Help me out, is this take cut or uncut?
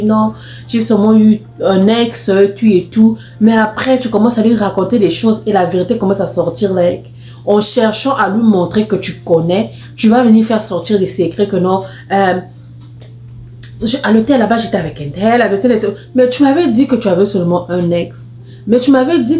uncut